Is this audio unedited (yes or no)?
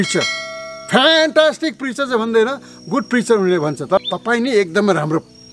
no